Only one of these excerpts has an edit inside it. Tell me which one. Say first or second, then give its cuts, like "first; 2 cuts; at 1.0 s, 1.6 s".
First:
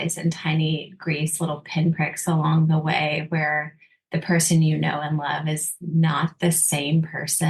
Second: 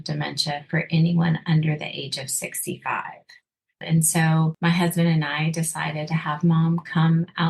second; 2 cuts; at 3.8 s, 4.5 s